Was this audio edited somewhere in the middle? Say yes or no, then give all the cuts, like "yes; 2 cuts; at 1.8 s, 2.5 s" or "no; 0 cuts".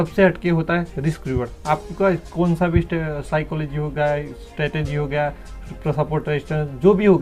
no; 0 cuts